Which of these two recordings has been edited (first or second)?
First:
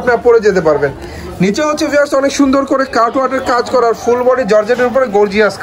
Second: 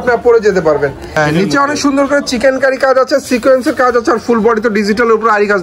second